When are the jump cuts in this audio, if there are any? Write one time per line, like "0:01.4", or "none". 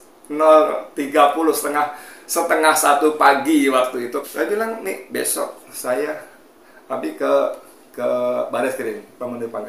0:04.2